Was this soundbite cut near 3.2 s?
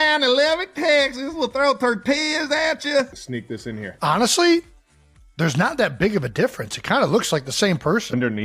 yes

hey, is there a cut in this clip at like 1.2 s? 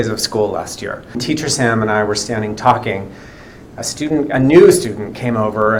yes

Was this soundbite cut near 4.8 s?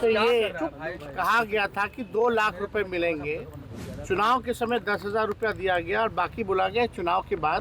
no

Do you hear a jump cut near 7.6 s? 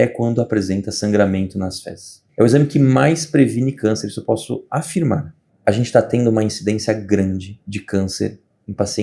no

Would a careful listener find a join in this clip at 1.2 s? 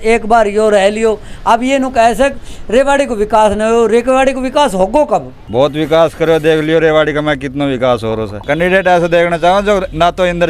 no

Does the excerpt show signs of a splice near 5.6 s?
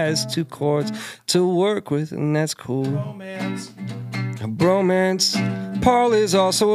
no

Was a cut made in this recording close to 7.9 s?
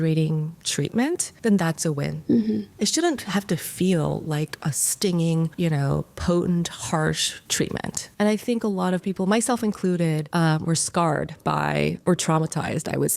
yes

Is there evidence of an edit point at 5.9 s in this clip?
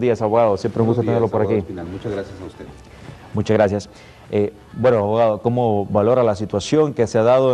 no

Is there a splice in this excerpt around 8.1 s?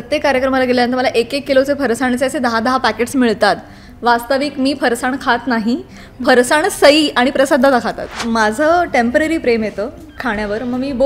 yes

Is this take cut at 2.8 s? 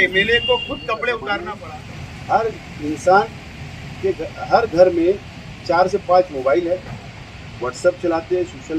no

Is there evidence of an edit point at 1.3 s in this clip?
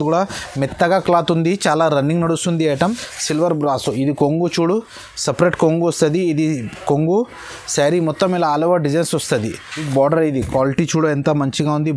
no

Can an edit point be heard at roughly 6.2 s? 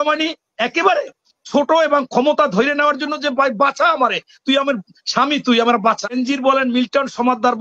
yes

